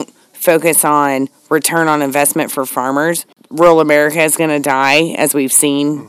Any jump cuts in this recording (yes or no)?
no